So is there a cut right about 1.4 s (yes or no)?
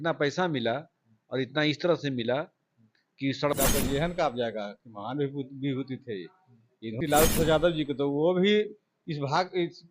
no